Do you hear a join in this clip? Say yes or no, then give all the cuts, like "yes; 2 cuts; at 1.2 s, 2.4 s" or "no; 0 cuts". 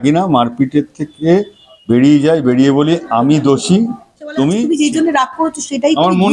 yes; 1 cut; at 4.3 s